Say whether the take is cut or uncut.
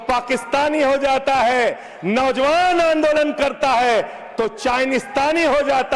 uncut